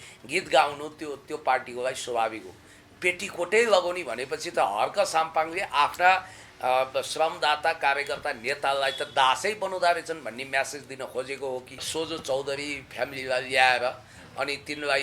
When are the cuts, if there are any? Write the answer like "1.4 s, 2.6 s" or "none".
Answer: 11.9 s